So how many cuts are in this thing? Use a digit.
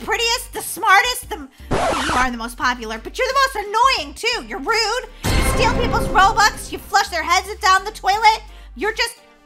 0